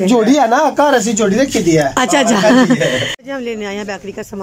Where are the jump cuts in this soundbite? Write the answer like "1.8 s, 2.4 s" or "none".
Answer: 3.2 s